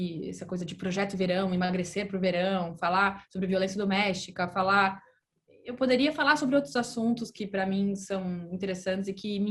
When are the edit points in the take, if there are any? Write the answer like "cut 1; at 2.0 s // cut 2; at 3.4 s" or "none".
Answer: none

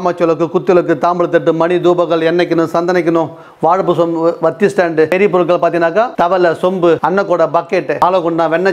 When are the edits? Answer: cut 1; at 5.1 s // cut 2; at 6.1 s // cut 3; at 7.0 s // cut 4; at 8.0 s

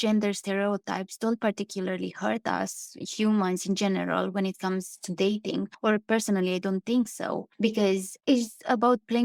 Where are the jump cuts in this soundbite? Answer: none

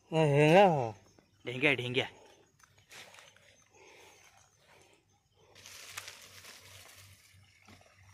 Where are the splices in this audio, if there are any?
cut 1; at 5.5 s

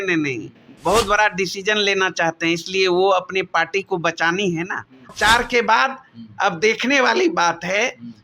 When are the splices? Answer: cut 1; at 5.1 s

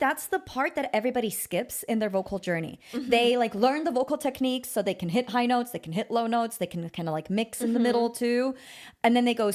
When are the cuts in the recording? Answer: none

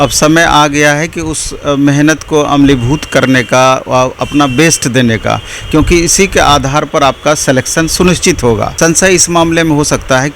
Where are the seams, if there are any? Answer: cut 1; at 8.7 s

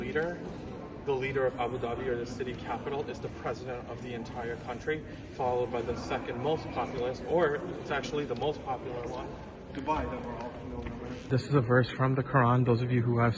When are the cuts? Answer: cut 1; at 11.3 s

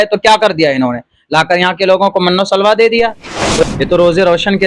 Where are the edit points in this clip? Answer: cut 1; at 3.6 s

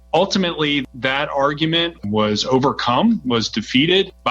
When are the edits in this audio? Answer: cut 1; at 1.9 s

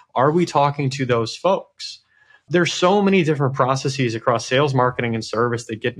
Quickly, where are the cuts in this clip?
cut 1; at 2.4 s

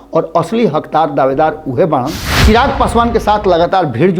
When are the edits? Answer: cut 1; at 2.2 s

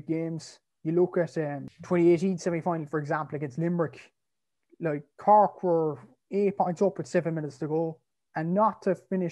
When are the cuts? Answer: cut 1; at 1.7 s

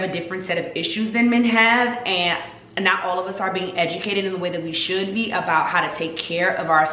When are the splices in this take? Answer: none

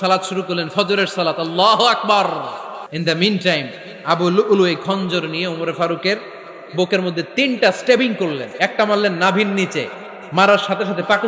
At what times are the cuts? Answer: cut 1; at 2.9 s

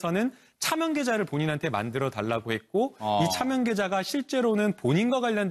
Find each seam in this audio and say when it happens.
none

